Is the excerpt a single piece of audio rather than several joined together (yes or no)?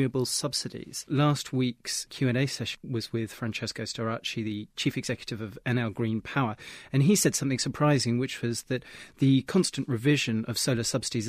no